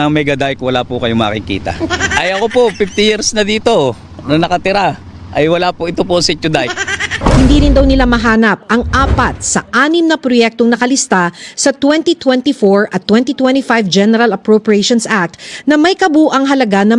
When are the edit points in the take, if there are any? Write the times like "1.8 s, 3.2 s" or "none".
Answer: 7.1 s

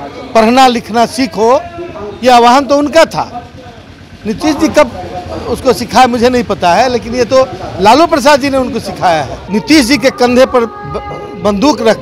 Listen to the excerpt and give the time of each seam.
9.4 s

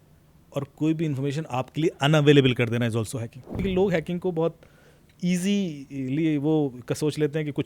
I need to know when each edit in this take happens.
3.6 s

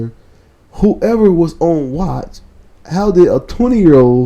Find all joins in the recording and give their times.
none

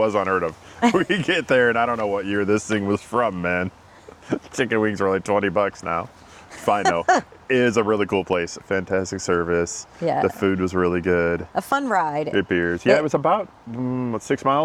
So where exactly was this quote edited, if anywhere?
none

